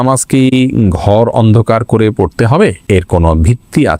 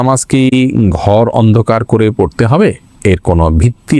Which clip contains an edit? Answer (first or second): first